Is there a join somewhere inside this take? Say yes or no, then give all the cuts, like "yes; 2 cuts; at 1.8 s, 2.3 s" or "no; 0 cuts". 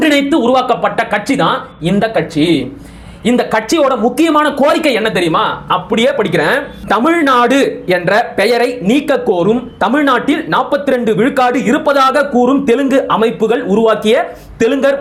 no; 0 cuts